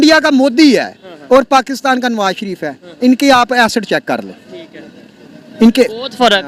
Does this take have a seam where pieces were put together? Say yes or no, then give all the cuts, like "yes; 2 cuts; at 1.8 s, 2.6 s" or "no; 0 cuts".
no; 0 cuts